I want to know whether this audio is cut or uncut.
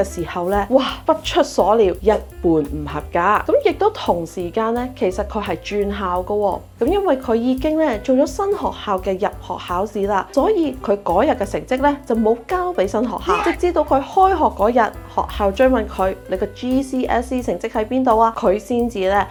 uncut